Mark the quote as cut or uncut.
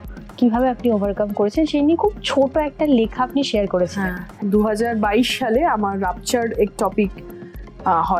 cut